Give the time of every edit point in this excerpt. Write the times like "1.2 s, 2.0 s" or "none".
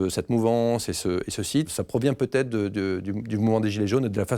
1.7 s